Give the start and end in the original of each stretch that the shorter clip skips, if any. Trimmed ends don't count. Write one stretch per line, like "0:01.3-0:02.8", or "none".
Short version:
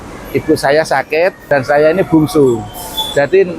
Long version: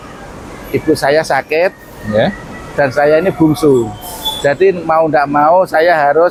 0:01.8-0:02.7